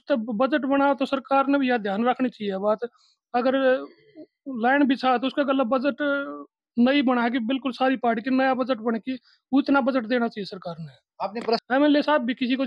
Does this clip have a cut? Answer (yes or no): yes